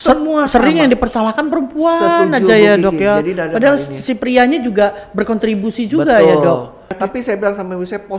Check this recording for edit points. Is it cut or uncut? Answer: cut